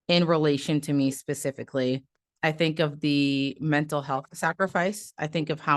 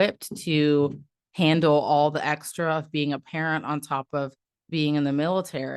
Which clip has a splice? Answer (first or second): first